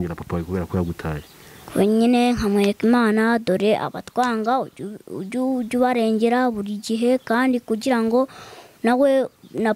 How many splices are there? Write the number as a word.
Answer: zero